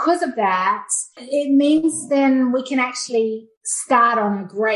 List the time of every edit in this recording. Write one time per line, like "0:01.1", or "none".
0:01.1